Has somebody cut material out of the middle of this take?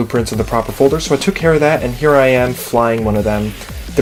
no; 0 cuts

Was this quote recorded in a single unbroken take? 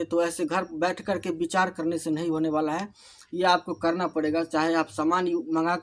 yes; 0 cuts

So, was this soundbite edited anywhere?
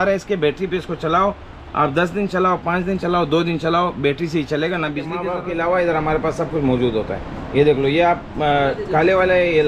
yes; 1 cut; at 5.2 s

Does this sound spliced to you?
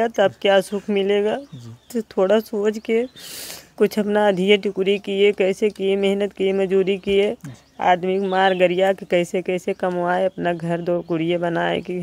no; 0 cuts

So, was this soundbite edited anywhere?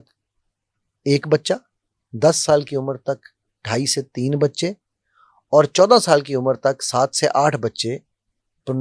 no; 0 cuts

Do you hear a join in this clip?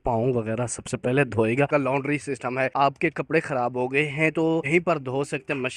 yes; 3 cuts; at 1.7 s, 2.7 s, 4.7 s

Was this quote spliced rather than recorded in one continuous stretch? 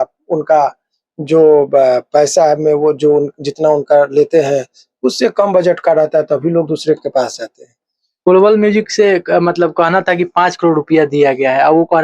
yes; 1 cut; at 8.3 s

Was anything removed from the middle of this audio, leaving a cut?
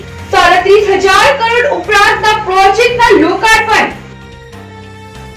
yes; 1 cut; at 4.0 s

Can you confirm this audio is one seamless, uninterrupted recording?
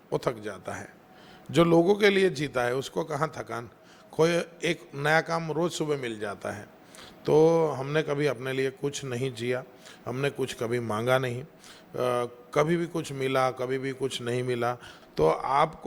no; 1 cut; at 14.9 s

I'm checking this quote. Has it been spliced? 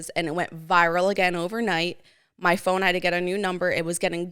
no; 0 cuts

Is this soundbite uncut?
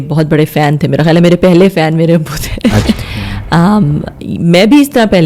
no; 1 cut; at 2.9 s

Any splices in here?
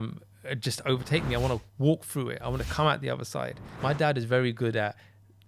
yes; 1 cut; at 3.7 s

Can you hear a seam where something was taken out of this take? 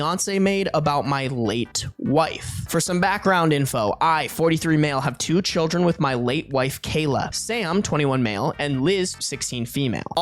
no; 0 cuts

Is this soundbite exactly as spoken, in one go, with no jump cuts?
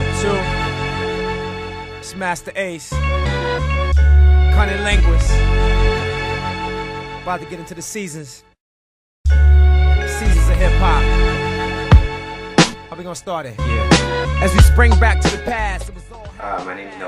yes; 0 cuts

